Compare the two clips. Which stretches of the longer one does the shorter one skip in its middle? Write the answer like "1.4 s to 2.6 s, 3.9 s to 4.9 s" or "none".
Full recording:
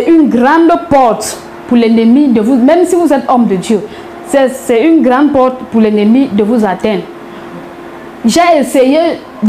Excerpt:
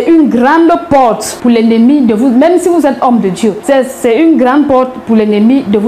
1.3 s to 1.5 s, 3.9 s to 4.2 s